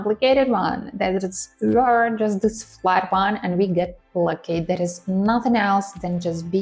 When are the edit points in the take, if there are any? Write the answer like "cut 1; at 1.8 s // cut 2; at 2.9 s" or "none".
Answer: none